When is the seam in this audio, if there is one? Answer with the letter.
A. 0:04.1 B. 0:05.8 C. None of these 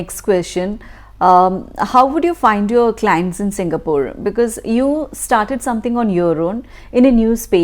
C